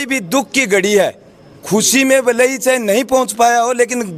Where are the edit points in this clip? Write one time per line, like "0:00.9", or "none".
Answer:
none